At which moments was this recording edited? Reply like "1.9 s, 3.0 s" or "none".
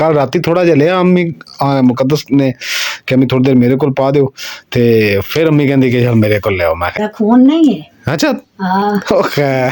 7.0 s